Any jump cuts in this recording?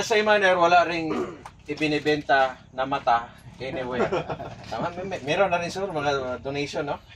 no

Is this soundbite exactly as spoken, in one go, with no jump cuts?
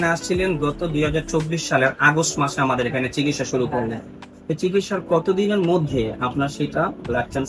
yes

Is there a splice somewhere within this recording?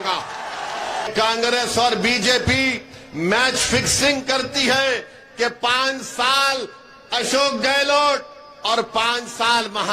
yes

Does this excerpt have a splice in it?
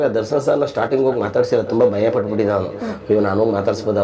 no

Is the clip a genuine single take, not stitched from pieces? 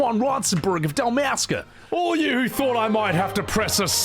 no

